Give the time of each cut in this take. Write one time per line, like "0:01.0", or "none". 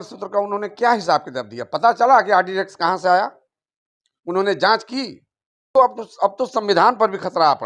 0:05.7